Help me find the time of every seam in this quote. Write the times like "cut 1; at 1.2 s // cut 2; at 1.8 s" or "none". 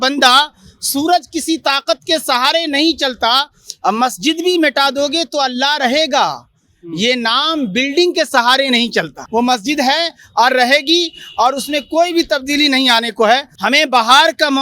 cut 1; at 9.2 s // cut 2; at 13.5 s

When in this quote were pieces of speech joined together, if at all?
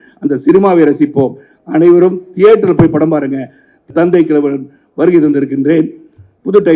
cut 1; at 3.9 s

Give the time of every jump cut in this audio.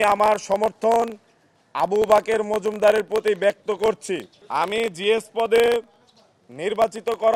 cut 1; at 4.3 s

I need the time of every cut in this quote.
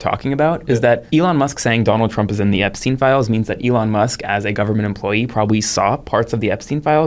cut 1; at 1.0 s

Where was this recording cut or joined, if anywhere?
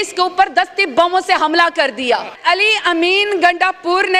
cut 1; at 2.4 s

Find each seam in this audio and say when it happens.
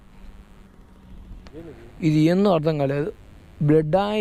cut 1; at 1.5 s

